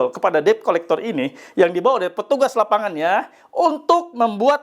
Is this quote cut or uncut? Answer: uncut